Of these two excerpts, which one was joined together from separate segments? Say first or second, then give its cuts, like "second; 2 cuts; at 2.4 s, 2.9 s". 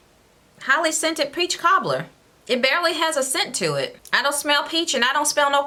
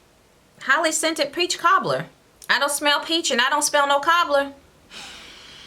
second; 2 cuts; at 2.3 s, 4.7 s